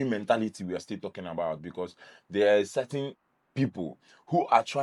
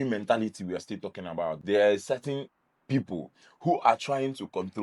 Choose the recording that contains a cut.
second; 1 cut; at 1.6 s

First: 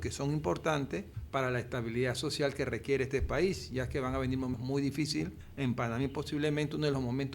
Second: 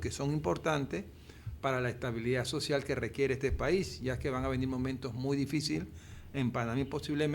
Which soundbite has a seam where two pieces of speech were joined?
first; 3 cuts; at 1.2 s, 4.5 s, 5.4 s

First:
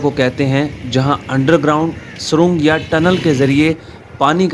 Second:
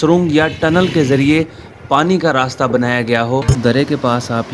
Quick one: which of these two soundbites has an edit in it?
second; 1 cut; at 3.4 s

